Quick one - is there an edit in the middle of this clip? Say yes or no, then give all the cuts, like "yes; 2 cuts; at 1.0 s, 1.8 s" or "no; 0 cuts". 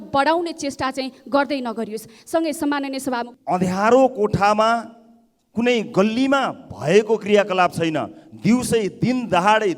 yes; 1 cut; at 3.3 s